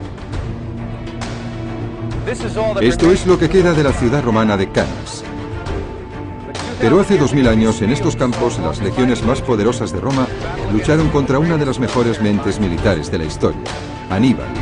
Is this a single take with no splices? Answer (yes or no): yes